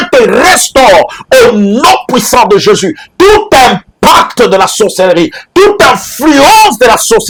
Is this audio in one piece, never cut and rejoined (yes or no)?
yes